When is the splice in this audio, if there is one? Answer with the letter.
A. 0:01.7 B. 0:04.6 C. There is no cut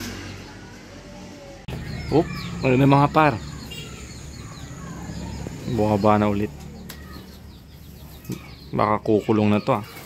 A